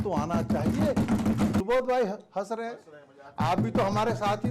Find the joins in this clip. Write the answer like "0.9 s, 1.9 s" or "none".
1.6 s